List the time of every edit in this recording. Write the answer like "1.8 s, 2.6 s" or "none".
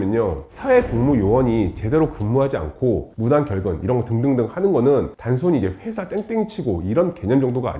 none

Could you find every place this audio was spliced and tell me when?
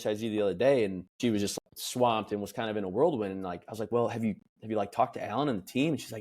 1.5 s

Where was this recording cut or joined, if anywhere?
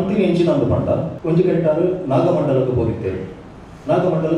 1.1 s

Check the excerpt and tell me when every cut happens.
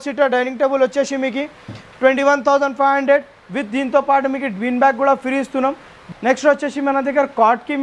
6.0 s

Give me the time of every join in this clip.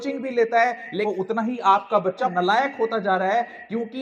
1.0 s, 2.3 s

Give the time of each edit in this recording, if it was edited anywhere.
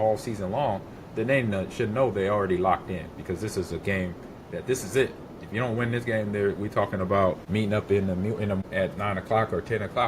7.4 s, 8.6 s

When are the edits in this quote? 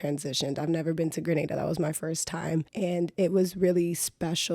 2.7 s

